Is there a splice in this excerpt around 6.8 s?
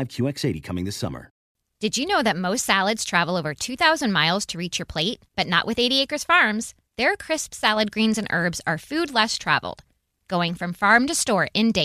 no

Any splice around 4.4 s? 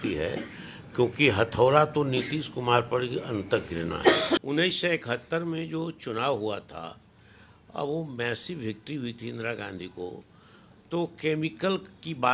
yes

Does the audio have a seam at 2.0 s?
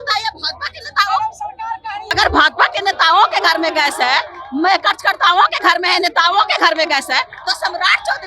yes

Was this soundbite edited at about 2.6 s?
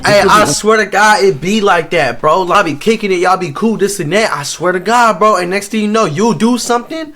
yes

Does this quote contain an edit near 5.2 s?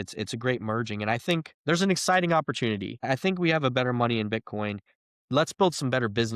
no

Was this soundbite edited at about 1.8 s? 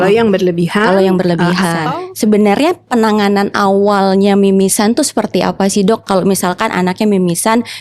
yes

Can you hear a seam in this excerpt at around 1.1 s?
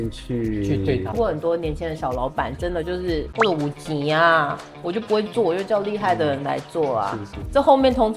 yes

